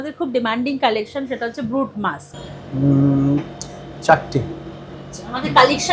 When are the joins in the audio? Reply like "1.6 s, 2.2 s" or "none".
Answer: 2.3 s

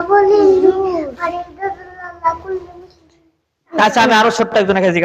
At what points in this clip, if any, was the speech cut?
3.8 s

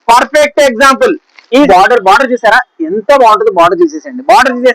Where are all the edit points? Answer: 1.7 s

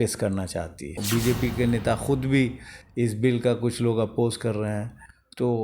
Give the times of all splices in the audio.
1.0 s

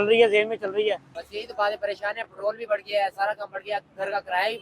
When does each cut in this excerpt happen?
1.1 s

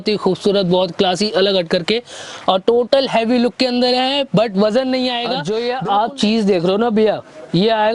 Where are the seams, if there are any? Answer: 5.4 s

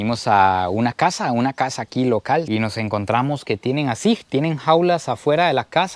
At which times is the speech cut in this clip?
2.5 s

